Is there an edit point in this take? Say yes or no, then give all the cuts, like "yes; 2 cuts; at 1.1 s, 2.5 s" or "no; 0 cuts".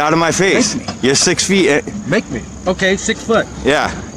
no; 0 cuts